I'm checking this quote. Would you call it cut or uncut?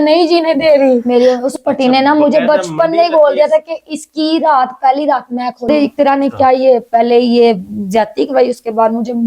cut